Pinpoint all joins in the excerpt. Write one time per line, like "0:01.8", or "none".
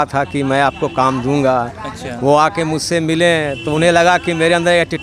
none